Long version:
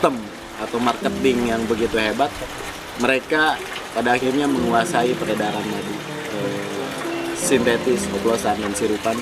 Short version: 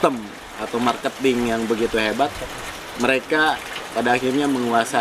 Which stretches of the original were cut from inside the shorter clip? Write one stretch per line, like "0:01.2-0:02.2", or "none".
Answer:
none